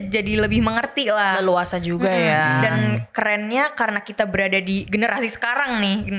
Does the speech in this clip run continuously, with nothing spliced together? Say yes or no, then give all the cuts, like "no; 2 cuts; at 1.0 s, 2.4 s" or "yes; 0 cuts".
yes; 0 cuts